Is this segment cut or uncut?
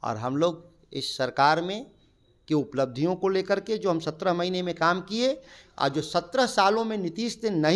uncut